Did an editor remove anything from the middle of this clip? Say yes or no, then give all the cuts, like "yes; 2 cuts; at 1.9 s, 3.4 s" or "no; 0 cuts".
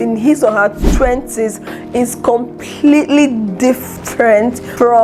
no; 0 cuts